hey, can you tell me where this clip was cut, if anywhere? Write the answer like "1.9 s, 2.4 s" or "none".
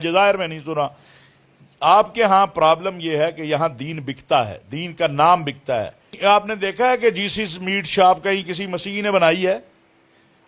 6.1 s

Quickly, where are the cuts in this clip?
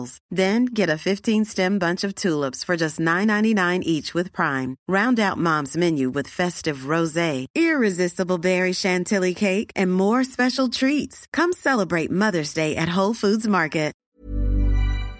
14.0 s

